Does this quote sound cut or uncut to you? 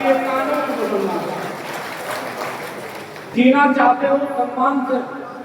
cut